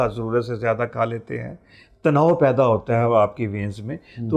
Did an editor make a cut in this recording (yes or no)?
no